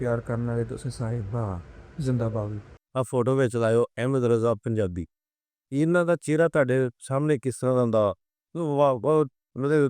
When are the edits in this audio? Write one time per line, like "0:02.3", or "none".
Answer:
0:02.8